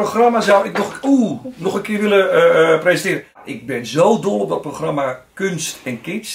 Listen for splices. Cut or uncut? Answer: cut